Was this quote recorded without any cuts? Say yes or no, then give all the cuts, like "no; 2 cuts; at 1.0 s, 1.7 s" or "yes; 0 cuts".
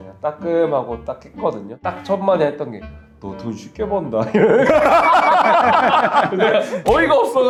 yes; 0 cuts